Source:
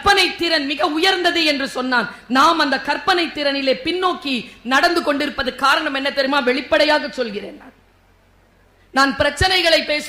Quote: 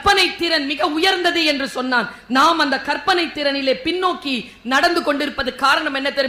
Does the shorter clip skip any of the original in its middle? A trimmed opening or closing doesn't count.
no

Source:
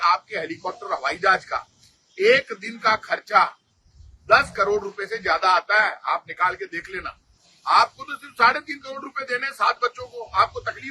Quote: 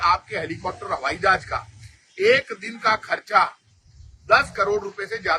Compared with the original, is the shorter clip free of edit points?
yes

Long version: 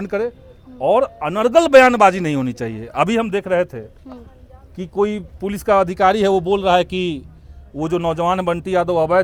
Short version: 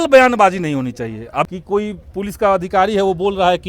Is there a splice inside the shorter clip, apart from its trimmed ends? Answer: yes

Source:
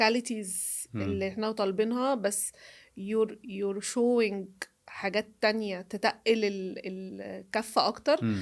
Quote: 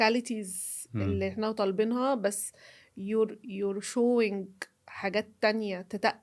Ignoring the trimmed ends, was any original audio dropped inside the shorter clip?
no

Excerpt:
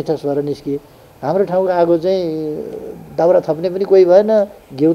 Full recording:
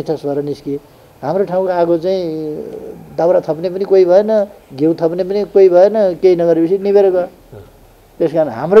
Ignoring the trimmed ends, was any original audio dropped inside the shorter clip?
no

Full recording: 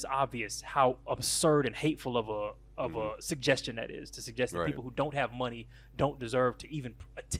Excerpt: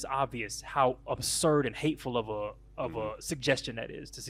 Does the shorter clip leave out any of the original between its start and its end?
no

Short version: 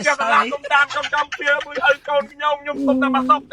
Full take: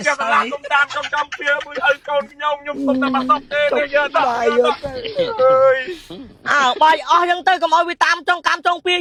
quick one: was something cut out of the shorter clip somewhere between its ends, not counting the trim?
no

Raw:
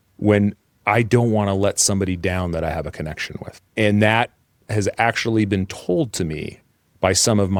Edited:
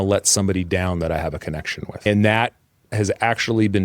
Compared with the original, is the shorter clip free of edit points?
no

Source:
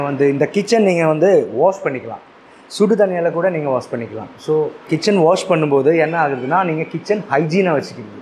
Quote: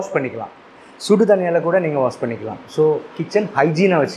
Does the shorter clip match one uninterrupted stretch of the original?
no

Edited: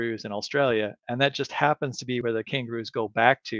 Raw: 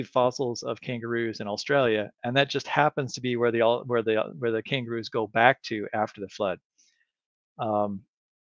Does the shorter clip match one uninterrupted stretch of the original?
no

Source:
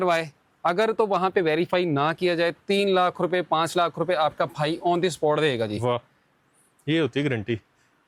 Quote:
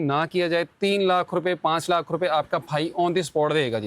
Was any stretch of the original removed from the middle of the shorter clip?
no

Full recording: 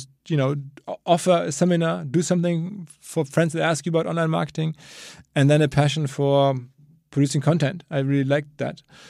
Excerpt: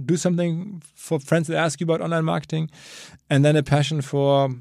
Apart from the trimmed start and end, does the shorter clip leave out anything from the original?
no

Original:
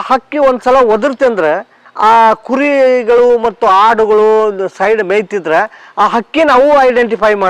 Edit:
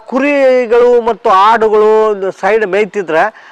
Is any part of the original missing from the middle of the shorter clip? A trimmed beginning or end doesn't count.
no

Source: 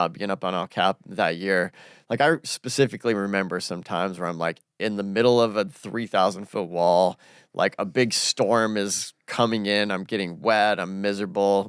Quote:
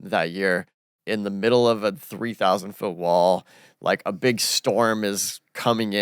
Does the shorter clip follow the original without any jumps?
no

